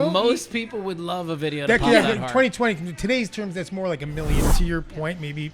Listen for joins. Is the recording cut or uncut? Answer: cut